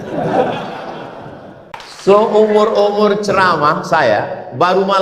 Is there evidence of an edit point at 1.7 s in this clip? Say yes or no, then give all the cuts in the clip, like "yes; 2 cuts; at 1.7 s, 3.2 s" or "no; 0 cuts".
yes; 1 cut; at 1.7 s